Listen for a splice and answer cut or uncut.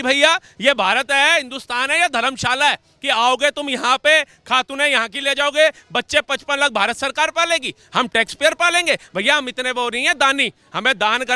uncut